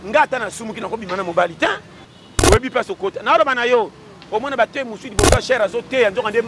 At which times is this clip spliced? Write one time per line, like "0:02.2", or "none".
0:02.1